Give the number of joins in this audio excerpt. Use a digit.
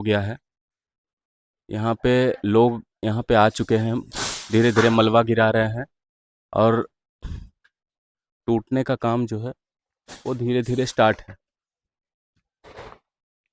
0